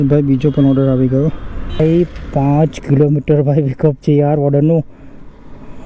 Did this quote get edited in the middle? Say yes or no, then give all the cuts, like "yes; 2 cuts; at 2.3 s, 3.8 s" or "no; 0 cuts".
yes; 1 cut; at 1.8 s